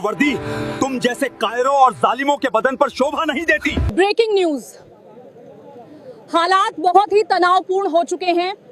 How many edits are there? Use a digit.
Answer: 1